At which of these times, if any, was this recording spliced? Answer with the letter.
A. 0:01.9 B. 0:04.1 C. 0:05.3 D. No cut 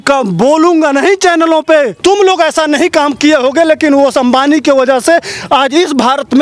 A